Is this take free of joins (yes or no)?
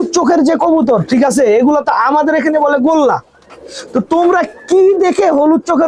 yes